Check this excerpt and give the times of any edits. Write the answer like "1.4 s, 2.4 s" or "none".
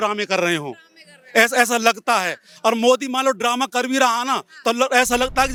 none